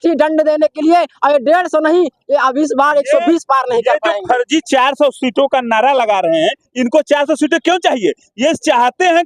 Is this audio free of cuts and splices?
yes; 0 cuts

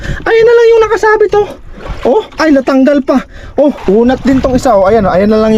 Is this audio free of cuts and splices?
no; 1 cut; at 3.8 s

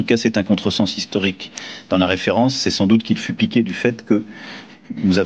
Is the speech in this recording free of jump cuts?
yes; 0 cuts

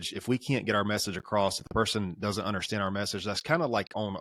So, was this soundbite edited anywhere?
no; 0 cuts

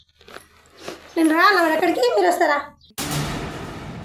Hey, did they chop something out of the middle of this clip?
no; 0 cuts

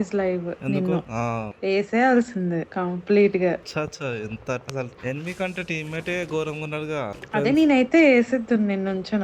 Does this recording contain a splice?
yes; 2 cuts; at 1.5 s, 7.2 s

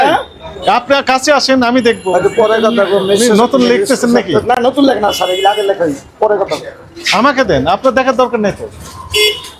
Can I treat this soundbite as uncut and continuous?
yes; 0 cuts

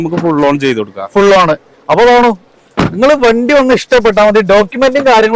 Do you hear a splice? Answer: no; 0 cuts

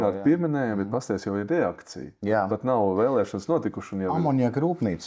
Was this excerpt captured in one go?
yes; 0 cuts

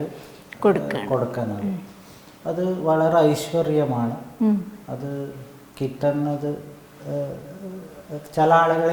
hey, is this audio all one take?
yes; 0 cuts

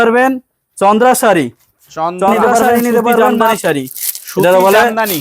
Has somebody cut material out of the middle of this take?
yes; 1 cut; at 3.6 s

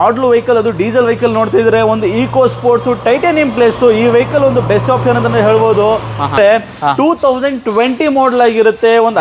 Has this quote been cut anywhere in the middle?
yes; 1 cut; at 6.4 s

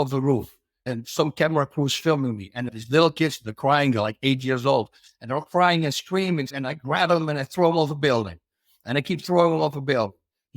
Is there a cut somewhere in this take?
yes; 2 cuts; at 2.8 s, 6.6 s

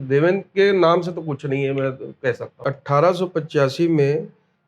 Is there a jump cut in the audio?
yes; 1 cut; at 2.5 s

